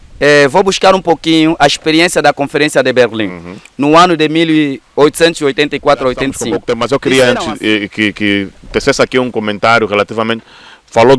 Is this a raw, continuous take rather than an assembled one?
no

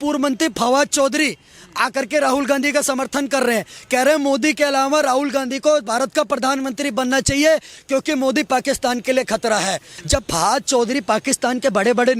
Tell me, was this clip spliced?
yes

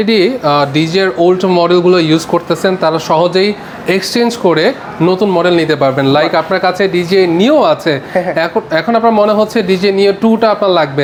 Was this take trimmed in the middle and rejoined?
no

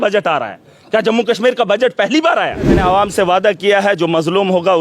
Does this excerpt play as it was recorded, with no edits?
no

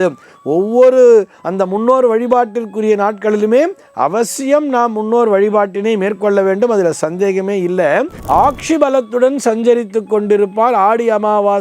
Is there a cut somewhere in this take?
yes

